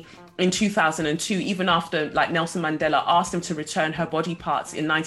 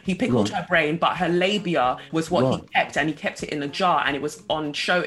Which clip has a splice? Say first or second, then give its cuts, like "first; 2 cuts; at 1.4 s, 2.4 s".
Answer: second; 1 cut; at 2.0 s